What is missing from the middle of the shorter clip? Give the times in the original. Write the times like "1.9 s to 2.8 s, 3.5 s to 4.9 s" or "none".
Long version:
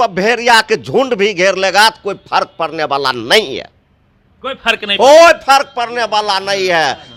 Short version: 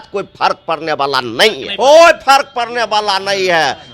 3.6 s to 4.9 s